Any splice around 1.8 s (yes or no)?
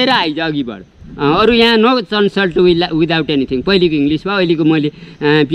no